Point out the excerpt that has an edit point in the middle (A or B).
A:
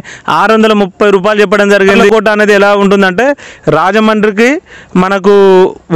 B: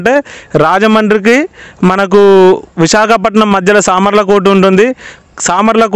A